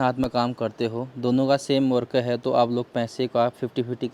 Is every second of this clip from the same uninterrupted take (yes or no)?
yes